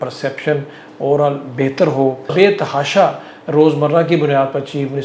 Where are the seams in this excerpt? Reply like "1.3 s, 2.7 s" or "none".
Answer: 2.3 s